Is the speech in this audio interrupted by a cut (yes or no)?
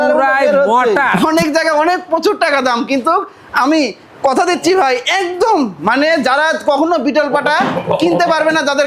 yes